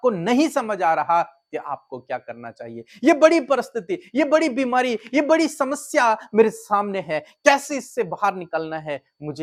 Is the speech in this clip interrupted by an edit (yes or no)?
no